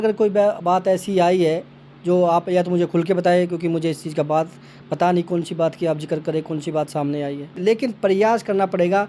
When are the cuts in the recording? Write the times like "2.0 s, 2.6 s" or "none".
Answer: 7.6 s